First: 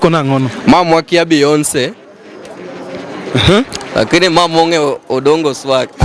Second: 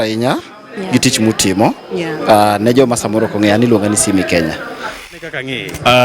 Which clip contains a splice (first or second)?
second